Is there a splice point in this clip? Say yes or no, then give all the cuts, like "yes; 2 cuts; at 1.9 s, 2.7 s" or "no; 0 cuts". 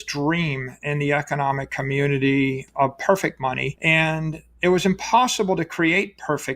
yes; 2 cuts; at 2.6 s, 3.7 s